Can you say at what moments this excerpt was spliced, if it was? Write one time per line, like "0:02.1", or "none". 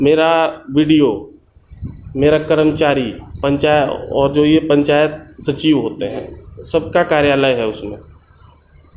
none